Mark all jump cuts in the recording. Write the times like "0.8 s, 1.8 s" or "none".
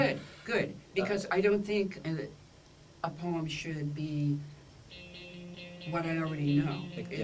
none